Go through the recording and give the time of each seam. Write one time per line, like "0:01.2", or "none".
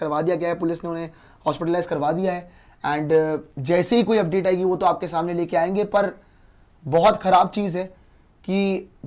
none

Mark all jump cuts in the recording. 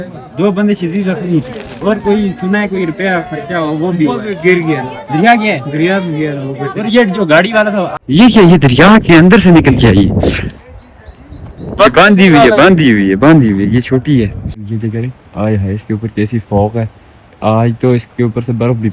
0:08.0
0:14.7

